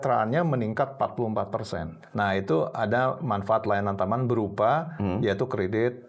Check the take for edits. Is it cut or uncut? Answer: cut